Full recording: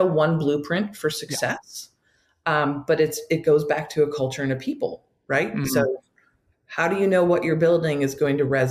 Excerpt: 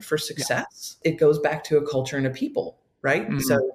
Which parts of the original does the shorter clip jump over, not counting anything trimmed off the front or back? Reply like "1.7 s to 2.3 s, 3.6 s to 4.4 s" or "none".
1.8 s to 3.2 s